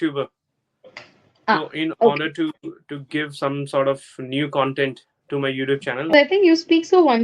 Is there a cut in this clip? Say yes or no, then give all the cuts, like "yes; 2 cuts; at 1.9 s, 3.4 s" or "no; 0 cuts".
yes; 1 cut; at 6.1 s